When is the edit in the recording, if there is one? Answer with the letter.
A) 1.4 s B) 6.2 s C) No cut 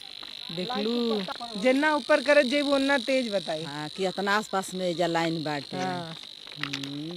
A